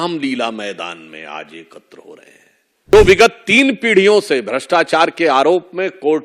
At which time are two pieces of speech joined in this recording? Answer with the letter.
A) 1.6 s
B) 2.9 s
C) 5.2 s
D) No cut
B